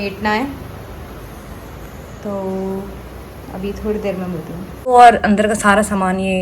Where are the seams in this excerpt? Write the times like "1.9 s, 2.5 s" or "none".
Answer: 4.9 s